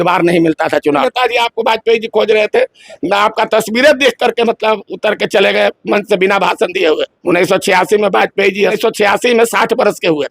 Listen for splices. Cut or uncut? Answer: cut